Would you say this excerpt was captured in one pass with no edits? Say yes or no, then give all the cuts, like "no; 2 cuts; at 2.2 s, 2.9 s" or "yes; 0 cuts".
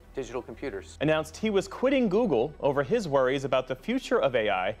yes; 0 cuts